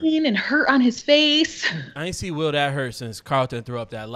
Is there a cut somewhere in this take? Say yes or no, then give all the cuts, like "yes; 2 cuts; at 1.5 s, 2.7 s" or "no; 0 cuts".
yes; 1 cut; at 1.9 s